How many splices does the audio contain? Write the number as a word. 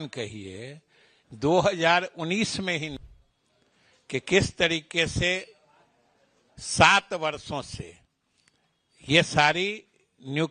one